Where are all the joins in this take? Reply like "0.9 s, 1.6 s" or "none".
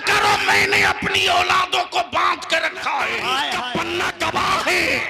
4.1 s